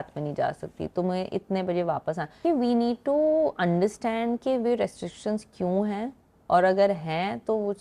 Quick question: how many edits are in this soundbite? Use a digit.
1